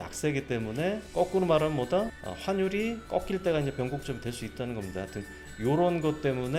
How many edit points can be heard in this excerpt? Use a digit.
3